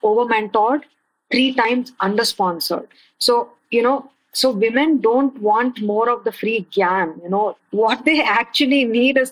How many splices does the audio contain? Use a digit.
2